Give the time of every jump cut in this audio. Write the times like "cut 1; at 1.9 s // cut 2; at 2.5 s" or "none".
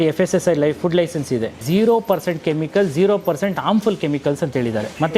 cut 1; at 1.6 s

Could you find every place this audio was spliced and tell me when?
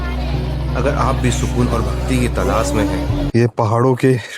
cut 1; at 3.3 s

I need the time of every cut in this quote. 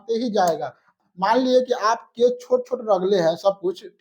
cut 1; at 1.0 s

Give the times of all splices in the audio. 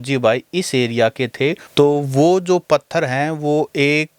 cut 1; at 1.6 s

